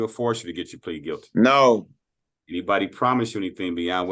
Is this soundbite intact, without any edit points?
yes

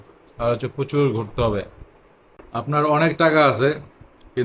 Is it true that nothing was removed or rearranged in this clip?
yes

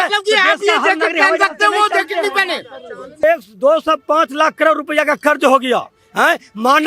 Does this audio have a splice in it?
yes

